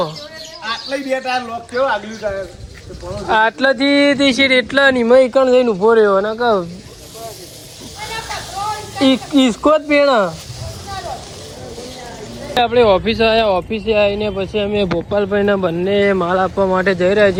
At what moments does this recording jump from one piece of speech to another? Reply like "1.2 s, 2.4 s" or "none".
none